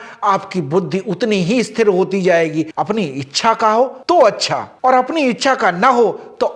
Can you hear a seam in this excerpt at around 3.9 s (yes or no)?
no